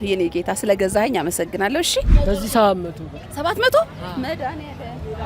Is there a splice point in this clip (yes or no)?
yes